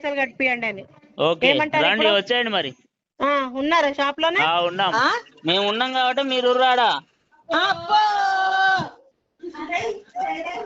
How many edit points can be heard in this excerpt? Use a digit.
1